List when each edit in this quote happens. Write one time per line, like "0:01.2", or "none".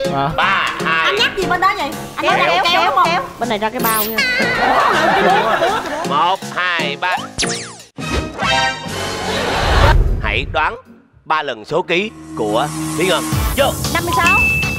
0:09.9